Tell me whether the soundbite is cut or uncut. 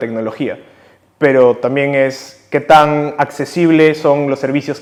uncut